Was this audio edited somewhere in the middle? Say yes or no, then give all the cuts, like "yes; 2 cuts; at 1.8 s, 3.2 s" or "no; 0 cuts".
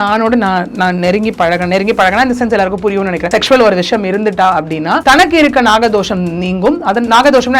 yes; 2 cuts; at 3.2 s, 5.0 s